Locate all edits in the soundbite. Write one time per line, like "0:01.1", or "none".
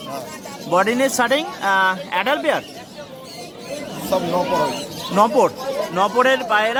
none